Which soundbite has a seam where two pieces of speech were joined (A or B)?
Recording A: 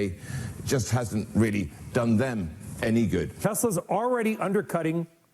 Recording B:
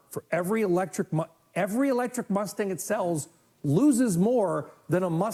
A